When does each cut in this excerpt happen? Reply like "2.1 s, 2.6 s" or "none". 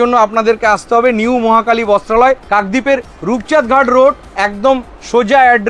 none